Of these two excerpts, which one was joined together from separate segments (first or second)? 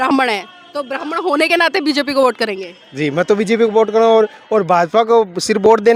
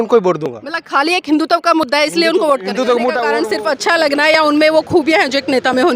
second